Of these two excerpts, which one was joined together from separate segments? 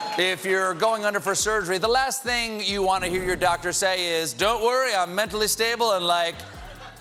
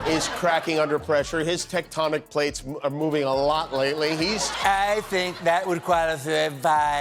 second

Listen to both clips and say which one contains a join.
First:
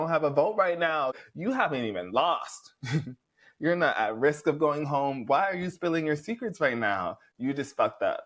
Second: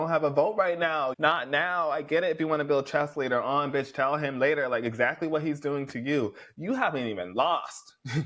first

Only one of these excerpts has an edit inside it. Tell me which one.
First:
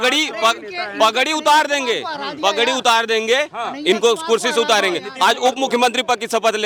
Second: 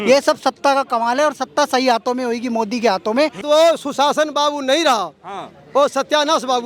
second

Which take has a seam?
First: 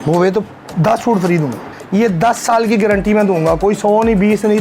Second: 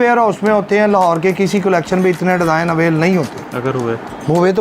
first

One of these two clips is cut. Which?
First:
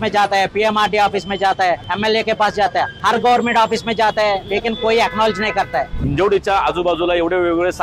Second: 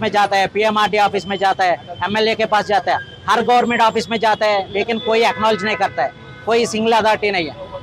first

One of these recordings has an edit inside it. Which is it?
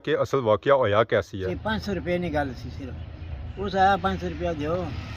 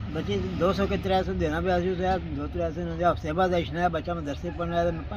first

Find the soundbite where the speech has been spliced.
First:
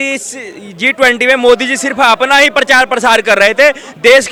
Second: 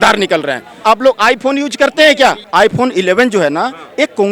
second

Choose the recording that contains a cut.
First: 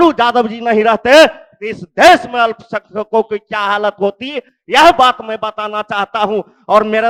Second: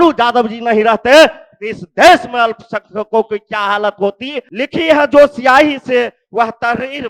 second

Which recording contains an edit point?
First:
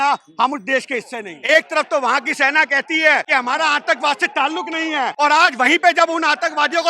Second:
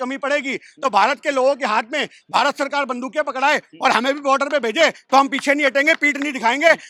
first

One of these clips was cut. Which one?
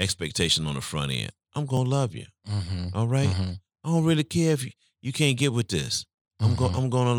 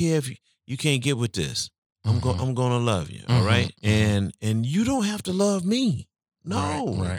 second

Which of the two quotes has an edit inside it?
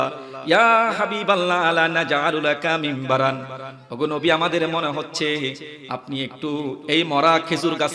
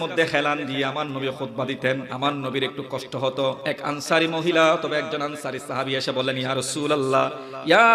second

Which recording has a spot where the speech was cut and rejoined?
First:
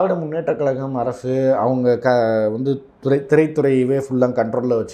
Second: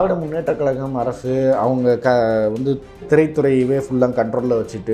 second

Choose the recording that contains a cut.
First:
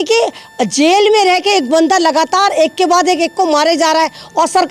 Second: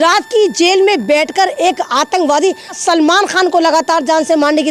second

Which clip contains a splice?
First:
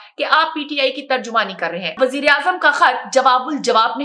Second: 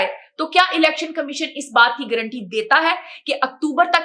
first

